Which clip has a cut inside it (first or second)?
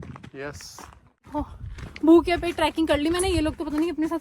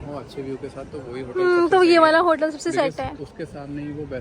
first